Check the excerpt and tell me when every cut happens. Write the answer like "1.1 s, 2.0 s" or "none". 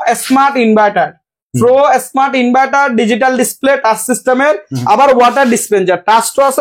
none